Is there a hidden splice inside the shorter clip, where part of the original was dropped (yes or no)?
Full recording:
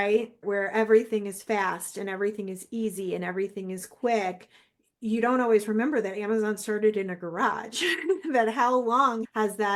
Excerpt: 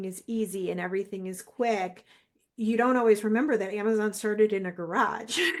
no